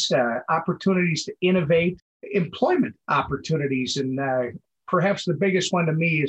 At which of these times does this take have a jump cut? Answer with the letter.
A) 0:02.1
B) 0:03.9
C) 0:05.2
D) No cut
D